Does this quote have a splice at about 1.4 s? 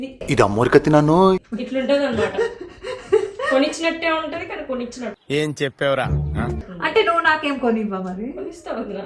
no; 0 cuts

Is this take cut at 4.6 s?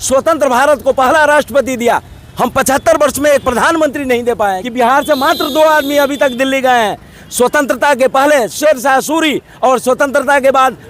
yes; 1 cut; at 4.6 s

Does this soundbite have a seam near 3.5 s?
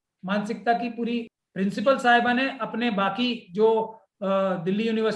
no; 1 cut; at 1.4 s

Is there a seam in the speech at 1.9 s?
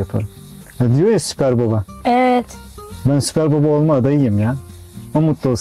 no; 0 cuts

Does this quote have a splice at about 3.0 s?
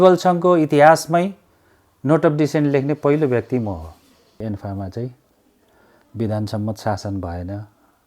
no; 1 cut; at 4.4 s

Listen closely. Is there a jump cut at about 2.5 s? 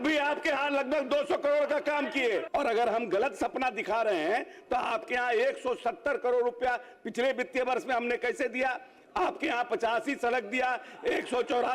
yes; 1 cut; at 2.5 s

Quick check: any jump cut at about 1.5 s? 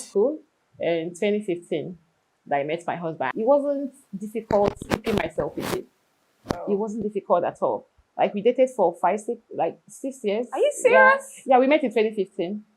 no; 1 cut; at 3.3 s

